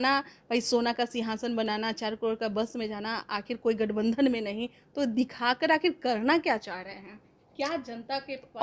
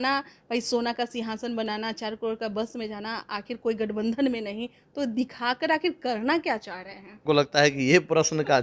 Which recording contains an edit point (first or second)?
second